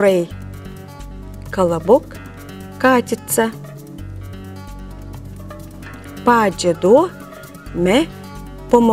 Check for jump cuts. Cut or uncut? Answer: cut